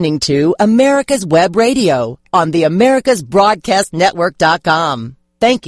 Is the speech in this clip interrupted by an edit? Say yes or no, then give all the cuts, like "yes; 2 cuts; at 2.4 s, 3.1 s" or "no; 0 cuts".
no; 0 cuts